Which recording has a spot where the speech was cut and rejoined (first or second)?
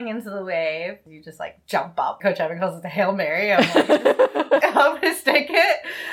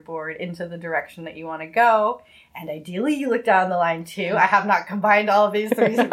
first